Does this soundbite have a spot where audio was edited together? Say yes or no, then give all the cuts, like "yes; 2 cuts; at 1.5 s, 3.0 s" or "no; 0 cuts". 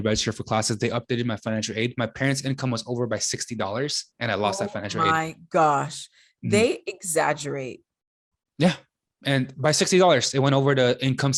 no; 0 cuts